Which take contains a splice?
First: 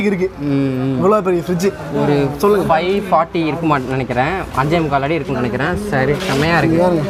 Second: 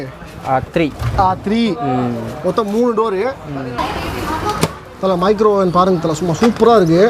second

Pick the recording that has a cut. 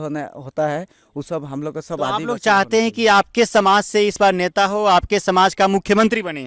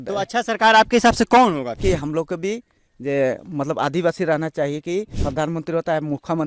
second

